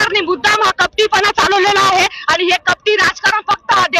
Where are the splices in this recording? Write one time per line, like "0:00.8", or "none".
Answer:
none